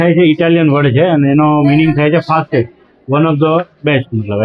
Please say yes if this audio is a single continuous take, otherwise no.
yes